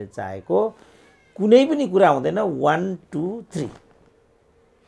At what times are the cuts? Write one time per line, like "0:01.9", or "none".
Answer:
none